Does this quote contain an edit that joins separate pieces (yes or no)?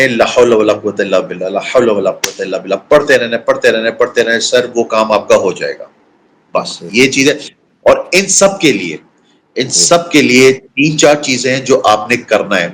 no